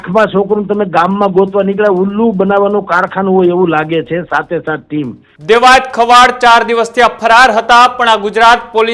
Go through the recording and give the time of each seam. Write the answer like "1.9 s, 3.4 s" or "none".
5.3 s